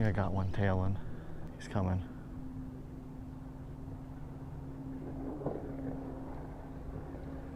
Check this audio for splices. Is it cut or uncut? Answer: cut